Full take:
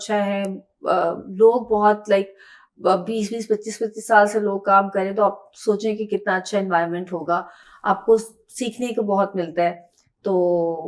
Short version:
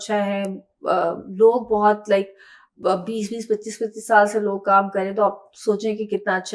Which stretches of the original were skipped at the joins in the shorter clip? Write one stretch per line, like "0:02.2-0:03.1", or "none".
none